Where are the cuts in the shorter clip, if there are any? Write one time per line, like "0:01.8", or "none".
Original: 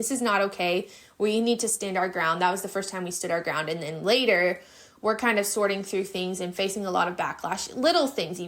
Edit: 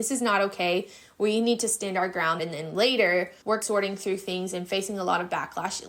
0:02.4
0:03.6